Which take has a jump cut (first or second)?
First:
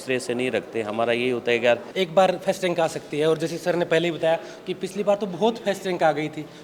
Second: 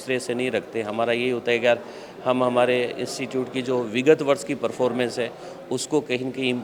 first